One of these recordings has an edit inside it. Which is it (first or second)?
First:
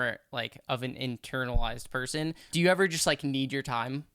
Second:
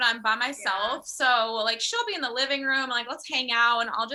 first